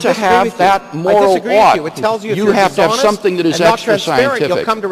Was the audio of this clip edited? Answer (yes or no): yes